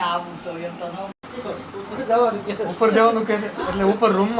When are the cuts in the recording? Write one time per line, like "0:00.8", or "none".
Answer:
0:01.1